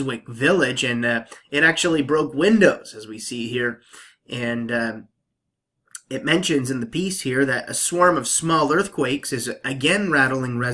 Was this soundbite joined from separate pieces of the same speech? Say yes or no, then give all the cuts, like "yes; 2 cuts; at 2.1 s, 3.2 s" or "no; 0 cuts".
yes; 1 cut; at 3.5 s